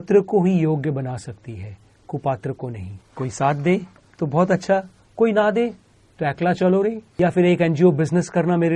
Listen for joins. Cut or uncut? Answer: cut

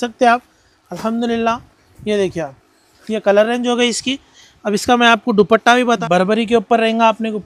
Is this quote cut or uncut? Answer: cut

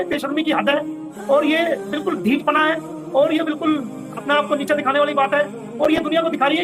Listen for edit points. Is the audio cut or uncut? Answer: uncut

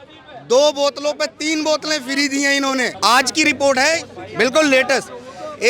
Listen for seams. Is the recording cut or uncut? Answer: cut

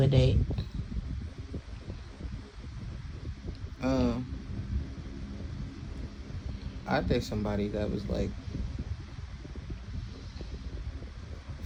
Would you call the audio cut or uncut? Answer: uncut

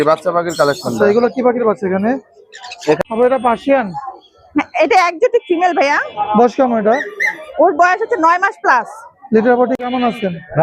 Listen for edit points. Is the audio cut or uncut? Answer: cut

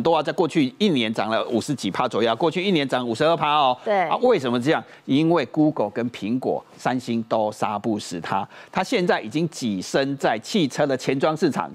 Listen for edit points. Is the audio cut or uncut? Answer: uncut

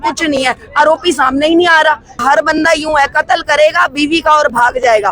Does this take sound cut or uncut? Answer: cut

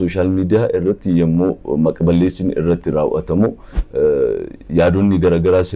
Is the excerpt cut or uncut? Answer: uncut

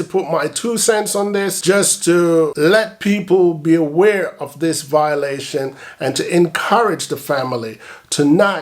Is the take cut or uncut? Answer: cut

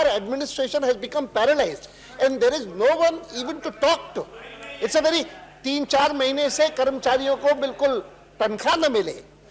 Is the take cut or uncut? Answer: uncut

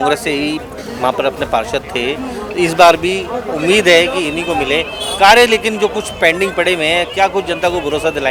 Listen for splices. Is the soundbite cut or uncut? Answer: uncut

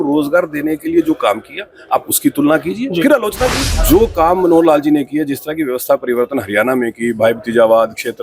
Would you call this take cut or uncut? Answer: cut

